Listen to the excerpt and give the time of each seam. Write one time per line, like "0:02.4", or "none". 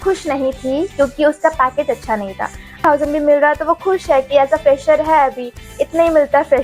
0:02.8